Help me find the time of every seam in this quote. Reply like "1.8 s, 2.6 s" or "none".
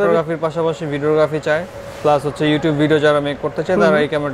none